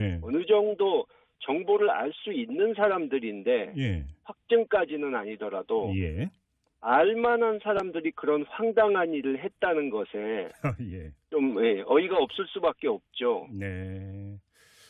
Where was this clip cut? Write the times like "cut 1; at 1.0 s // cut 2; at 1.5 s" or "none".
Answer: none